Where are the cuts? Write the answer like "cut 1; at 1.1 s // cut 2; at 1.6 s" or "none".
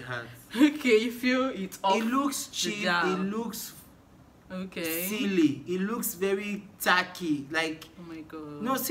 none